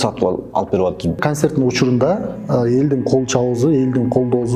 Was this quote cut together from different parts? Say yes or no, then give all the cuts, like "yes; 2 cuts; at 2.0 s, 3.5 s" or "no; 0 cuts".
yes; 1 cut; at 1.2 s